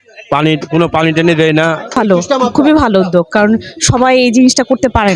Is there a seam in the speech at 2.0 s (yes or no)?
yes